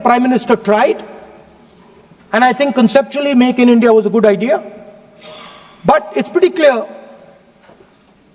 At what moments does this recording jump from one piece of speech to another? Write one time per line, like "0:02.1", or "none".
none